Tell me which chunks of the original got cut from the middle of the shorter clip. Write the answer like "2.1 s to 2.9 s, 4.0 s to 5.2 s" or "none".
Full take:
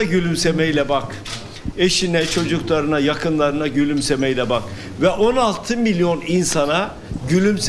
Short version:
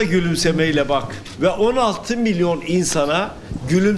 1.2 s to 4.8 s